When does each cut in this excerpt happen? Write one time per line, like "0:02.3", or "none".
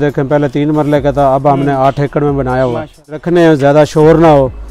0:03.2

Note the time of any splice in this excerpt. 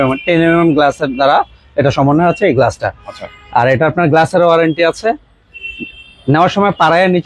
none

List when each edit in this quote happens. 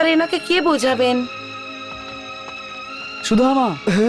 none

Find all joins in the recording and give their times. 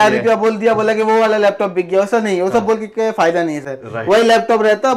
none

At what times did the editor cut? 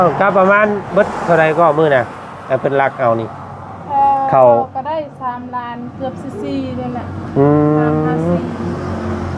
none

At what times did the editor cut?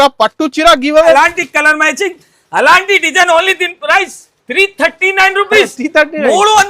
0:01.1

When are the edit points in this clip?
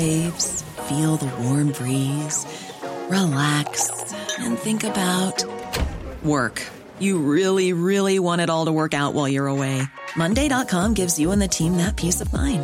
none

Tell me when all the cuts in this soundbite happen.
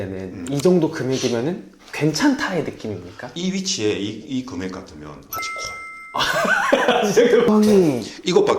0:07.5

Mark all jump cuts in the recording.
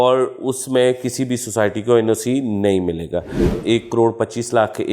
0:03.6

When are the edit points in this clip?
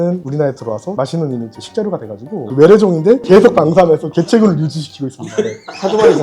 0:02.5
0:03.2

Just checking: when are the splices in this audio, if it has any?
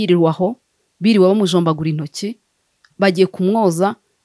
none

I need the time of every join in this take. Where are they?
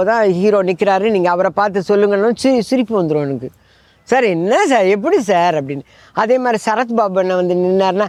none

